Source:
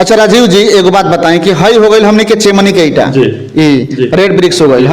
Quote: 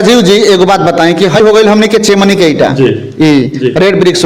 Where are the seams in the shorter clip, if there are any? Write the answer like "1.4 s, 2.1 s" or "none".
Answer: 1.4 s